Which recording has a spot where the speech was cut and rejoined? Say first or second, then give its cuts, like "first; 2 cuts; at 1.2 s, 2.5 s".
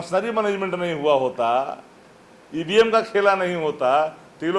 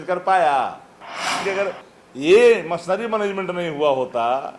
second; 1 cut; at 1.4 s